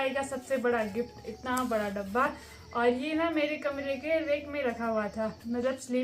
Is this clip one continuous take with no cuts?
yes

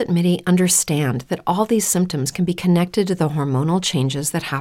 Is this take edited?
no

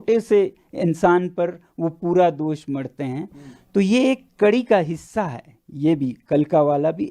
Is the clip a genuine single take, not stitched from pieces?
yes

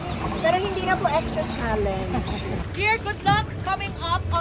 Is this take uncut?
no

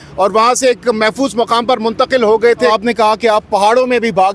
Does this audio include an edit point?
yes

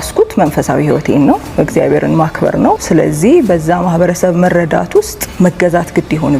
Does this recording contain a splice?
yes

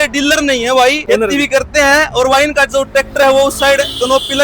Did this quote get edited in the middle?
yes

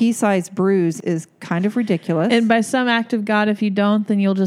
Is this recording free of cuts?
no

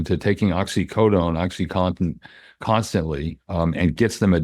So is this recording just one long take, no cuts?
yes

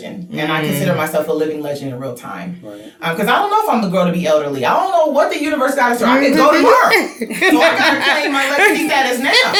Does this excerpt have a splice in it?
no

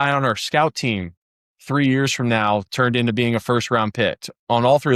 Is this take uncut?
yes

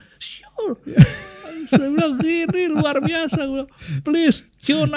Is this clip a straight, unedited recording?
yes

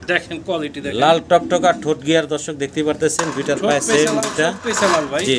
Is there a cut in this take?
no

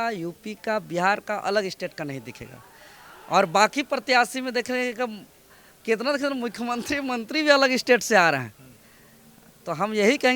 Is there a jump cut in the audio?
no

